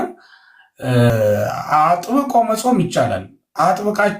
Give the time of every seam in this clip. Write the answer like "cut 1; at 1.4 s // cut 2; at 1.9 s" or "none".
cut 1; at 1.1 s